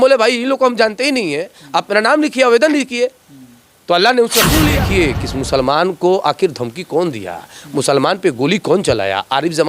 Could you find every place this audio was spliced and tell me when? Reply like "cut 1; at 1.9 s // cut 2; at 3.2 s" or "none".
cut 1; at 4.7 s